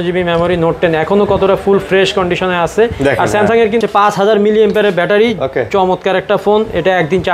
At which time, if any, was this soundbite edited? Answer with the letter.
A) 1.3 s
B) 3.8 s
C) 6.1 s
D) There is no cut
B